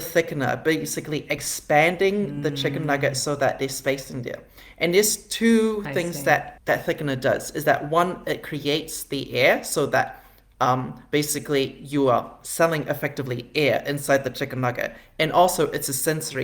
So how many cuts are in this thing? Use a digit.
0